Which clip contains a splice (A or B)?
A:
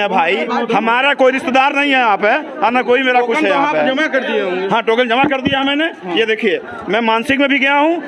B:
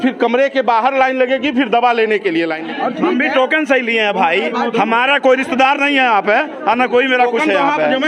B